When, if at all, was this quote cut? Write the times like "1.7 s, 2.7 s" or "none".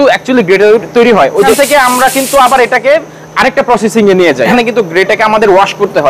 1.5 s, 4.5 s